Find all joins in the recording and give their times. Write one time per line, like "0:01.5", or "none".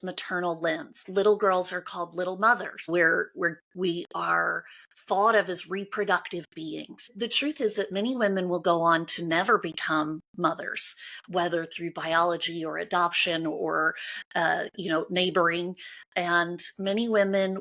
0:01.0
0:02.9
0:07.1